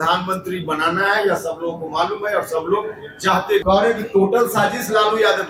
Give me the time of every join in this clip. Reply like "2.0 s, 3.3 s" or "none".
3.6 s